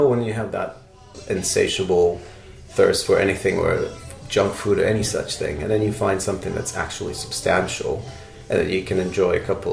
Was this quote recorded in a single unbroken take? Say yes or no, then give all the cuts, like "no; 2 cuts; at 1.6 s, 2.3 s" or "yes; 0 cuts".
no; 1 cut; at 1.1 s